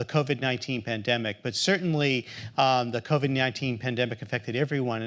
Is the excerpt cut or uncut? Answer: uncut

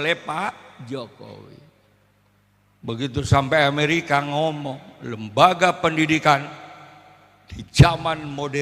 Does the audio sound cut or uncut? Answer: uncut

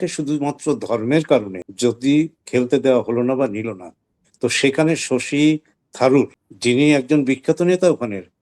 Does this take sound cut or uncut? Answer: cut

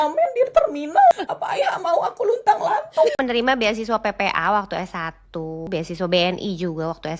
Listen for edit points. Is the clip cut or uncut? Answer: cut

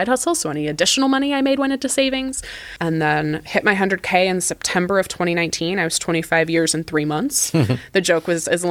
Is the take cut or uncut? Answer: cut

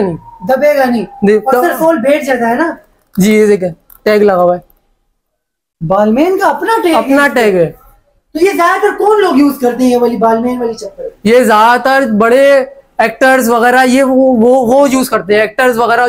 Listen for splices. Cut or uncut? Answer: uncut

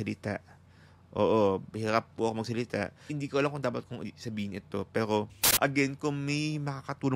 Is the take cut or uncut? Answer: cut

